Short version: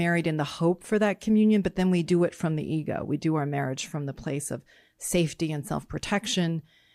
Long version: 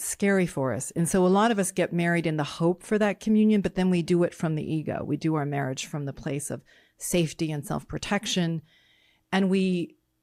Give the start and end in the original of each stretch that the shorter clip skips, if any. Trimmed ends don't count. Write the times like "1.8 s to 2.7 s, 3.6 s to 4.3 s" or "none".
none